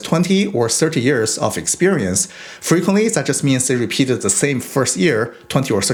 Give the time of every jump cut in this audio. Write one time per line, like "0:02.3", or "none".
none